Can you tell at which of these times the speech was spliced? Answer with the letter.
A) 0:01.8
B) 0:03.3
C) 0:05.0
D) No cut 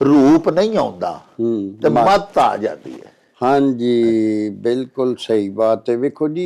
D